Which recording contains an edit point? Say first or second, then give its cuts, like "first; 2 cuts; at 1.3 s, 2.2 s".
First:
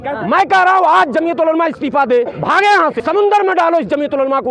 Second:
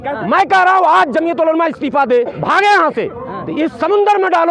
first; 1 cut; at 3.0 s